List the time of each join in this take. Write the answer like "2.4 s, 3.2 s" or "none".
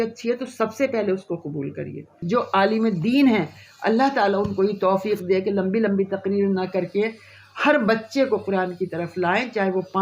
2.1 s